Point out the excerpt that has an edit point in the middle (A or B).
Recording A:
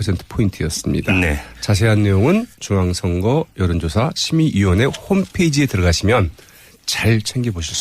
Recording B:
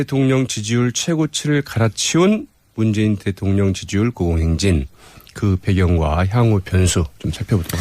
A